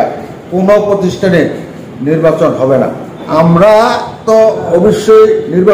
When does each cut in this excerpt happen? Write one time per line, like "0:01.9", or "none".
0:03.2